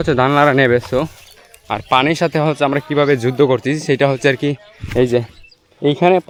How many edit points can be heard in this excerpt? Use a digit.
0